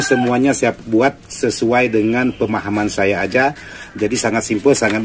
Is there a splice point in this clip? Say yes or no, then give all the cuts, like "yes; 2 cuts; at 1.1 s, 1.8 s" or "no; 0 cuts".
no; 0 cuts